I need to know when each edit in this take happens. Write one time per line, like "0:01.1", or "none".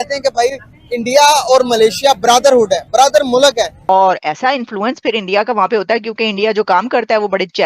0:03.8